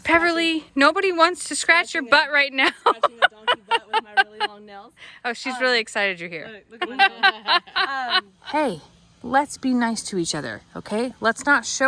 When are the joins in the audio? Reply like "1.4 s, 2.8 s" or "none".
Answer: 8.4 s